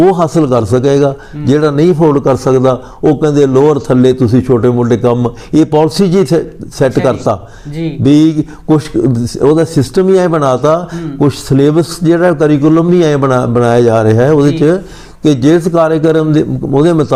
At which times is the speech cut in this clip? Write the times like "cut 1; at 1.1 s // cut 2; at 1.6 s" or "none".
none